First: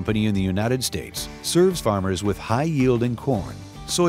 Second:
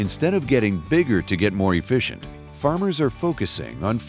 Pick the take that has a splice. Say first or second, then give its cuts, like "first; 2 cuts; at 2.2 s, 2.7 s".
first; 1 cut; at 1.8 s